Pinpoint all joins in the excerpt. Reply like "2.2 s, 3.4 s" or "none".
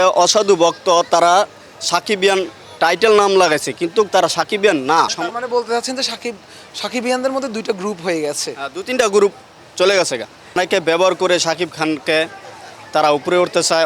5.2 s, 10.6 s